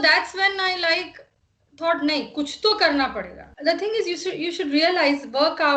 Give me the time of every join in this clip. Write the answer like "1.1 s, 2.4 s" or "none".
3.4 s